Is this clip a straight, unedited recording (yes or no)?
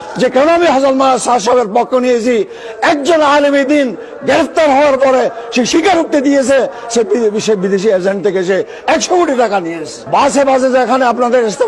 no